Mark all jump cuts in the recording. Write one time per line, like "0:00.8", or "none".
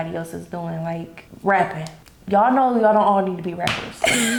none